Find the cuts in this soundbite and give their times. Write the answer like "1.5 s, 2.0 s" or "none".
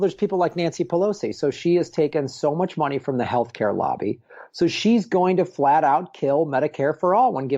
none